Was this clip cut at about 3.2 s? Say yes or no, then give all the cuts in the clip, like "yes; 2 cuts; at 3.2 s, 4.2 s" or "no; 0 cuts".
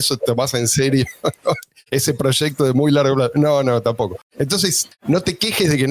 no; 1 cut; at 4.5 s